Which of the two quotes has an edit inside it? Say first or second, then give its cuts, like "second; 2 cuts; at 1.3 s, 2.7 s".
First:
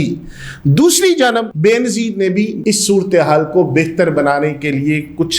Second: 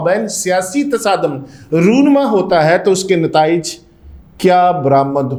first; 2 cuts; at 1.5 s, 2.6 s